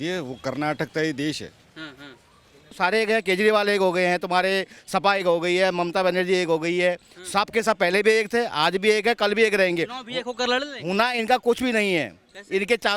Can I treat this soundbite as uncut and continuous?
no; 1 cut; at 2.7 s

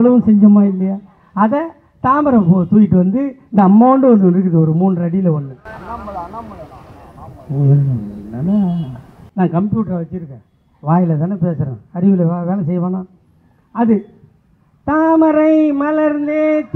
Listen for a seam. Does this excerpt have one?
no; 0 cuts

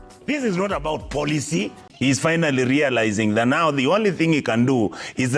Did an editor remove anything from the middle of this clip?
yes; 1 cut; at 1.9 s

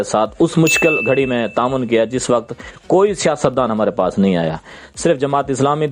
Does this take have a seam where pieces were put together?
no; 0 cuts

